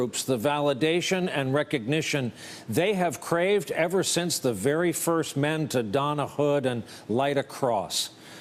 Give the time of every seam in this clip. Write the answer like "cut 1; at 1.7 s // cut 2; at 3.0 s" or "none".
none